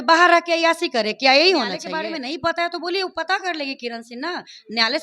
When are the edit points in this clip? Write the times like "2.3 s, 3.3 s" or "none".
1.9 s